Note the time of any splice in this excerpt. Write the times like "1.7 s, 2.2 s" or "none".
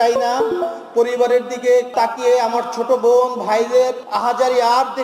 1.9 s, 4.0 s